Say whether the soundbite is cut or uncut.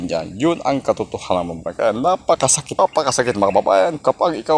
cut